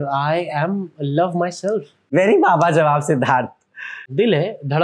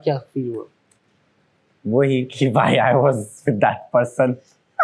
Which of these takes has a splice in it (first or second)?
first